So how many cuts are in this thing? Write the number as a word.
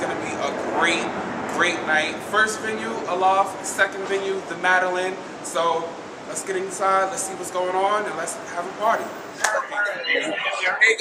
zero